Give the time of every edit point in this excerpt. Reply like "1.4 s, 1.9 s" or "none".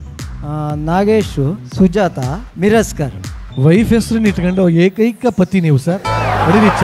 none